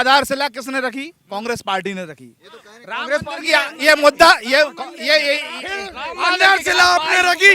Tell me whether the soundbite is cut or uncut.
uncut